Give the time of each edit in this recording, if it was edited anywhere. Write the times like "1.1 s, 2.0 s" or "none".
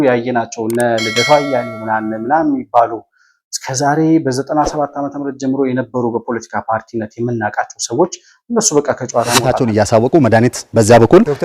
9.5 s